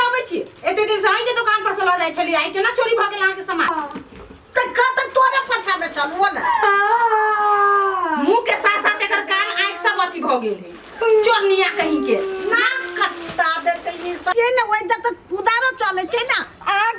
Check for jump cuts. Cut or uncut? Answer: cut